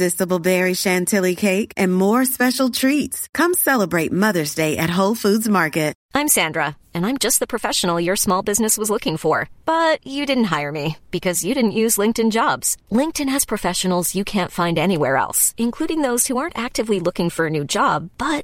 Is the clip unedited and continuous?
no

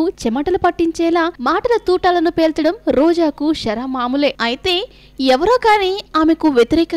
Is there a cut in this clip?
yes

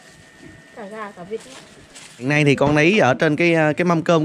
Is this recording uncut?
no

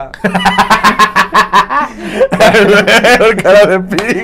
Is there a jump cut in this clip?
no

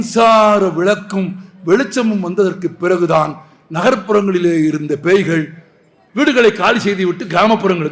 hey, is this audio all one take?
no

